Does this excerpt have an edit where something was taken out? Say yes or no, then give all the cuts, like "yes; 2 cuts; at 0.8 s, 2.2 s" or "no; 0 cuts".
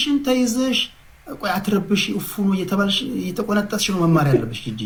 no; 0 cuts